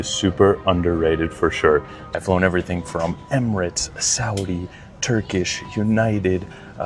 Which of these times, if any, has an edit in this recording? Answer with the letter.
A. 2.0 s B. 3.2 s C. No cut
A